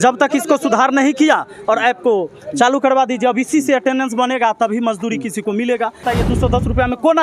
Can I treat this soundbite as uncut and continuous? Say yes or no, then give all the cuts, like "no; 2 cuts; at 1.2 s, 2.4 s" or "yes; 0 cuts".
no; 1 cut; at 6.0 s